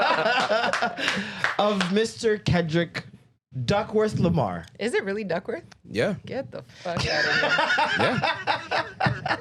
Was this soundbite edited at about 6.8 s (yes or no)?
no